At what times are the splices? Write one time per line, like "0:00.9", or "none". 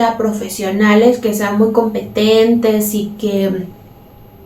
none